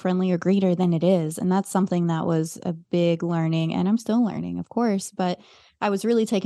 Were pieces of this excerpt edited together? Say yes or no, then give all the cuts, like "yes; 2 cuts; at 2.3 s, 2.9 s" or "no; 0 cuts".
no; 0 cuts